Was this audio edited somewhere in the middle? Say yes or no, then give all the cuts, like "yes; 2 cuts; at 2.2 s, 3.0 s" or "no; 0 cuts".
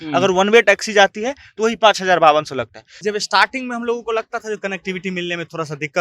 yes; 1 cut; at 2.9 s